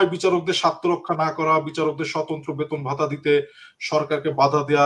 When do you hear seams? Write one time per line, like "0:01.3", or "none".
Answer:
none